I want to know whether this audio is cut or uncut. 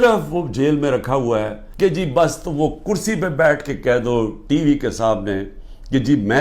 cut